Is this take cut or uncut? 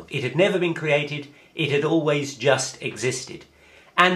uncut